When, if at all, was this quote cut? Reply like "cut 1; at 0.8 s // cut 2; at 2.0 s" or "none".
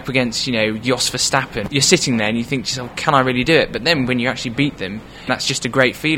cut 1; at 1.6 s // cut 2; at 5.3 s